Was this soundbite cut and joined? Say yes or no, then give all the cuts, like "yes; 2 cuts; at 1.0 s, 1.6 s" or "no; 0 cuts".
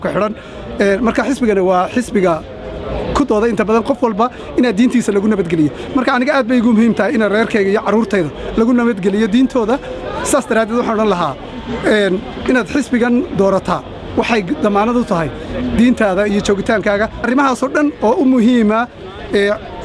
yes; 1 cut; at 17.2 s